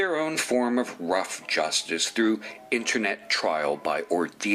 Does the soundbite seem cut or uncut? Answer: cut